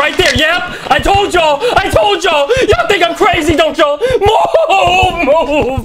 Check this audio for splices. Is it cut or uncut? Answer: uncut